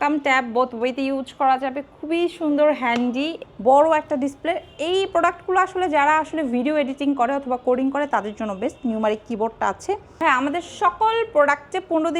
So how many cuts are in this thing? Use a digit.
2